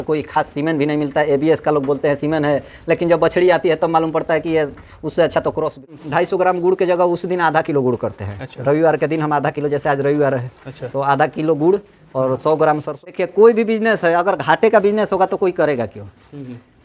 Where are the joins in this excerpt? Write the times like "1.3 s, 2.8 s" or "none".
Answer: 5.9 s, 13.0 s